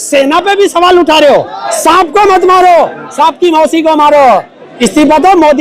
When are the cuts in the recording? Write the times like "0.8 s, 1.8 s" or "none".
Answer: 1.6 s, 4.6 s